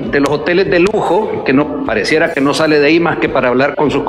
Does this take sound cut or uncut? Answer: uncut